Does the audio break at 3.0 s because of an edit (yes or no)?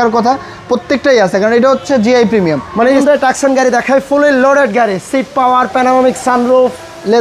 yes